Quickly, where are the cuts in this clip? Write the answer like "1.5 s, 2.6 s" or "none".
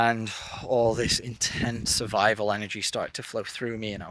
none

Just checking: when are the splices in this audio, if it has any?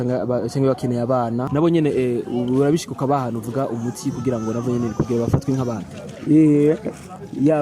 1.5 s

